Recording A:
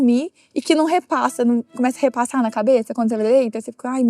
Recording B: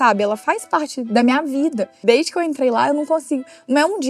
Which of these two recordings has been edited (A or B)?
B